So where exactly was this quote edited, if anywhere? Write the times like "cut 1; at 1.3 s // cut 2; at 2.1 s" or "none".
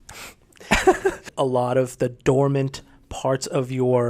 cut 1; at 1.3 s